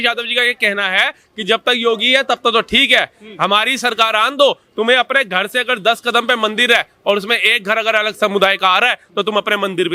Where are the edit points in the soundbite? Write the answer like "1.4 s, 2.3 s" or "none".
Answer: none